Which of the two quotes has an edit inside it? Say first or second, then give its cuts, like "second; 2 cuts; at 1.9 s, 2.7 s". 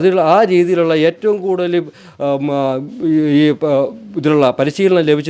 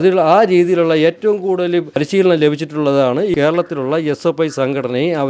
second; 2 cuts; at 1.9 s, 3.3 s